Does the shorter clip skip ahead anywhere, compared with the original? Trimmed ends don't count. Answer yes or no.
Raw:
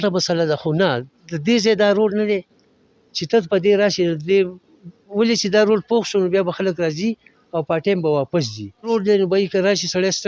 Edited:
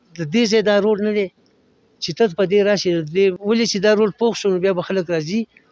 yes